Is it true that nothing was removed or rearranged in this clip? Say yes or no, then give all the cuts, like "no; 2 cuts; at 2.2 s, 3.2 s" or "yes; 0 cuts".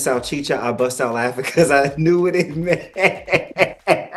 yes; 0 cuts